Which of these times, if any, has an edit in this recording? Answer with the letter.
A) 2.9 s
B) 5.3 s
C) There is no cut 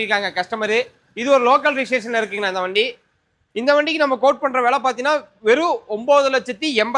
C